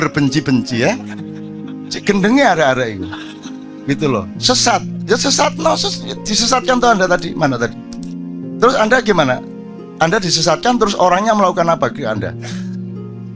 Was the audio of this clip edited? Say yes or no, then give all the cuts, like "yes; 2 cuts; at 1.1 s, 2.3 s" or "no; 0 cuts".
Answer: no; 0 cuts